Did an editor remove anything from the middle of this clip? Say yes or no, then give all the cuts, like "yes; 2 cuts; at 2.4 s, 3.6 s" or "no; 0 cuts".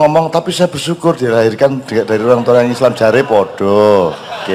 no; 0 cuts